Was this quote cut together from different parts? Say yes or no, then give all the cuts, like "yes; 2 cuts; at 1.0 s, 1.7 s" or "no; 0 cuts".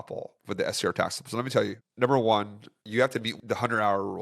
yes; 2 cuts; at 1.8 s, 3.3 s